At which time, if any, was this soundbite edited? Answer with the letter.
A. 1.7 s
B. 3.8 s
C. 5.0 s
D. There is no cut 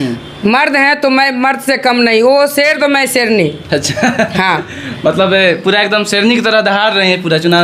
D